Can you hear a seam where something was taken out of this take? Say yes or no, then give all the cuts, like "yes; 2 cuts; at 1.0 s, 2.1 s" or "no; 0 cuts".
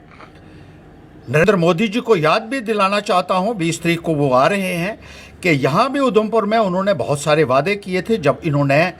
yes; 1 cut; at 1.4 s